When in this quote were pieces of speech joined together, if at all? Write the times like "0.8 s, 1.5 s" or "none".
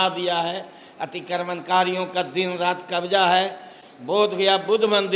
none